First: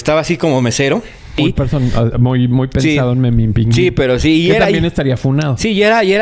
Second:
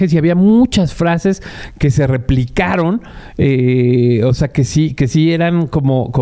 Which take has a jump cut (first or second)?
first